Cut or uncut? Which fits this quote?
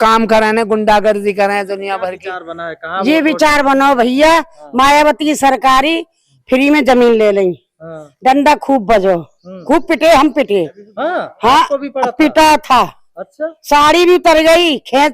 cut